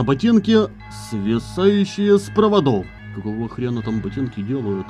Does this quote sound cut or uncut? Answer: cut